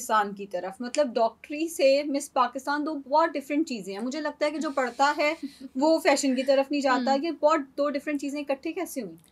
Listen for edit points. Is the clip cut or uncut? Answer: uncut